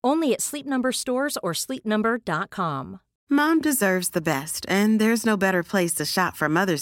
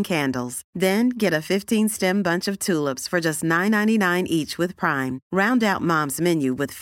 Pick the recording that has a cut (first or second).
first